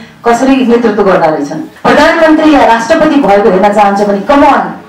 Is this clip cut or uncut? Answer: cut